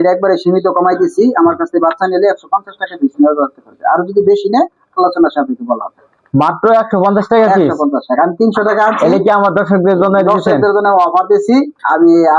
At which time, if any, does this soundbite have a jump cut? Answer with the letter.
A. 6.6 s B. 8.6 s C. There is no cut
C